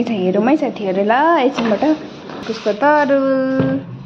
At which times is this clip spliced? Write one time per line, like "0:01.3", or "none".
0:02.5